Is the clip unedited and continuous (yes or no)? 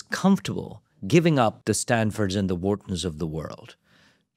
no